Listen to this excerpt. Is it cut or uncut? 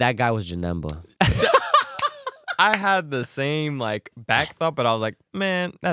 cut